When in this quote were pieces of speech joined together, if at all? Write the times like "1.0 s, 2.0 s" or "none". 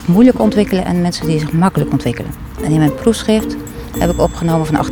none